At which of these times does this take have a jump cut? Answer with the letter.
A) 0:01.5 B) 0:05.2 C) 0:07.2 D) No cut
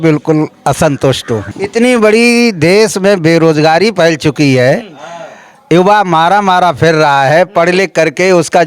A